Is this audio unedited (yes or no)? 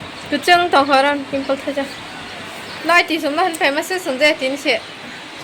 yes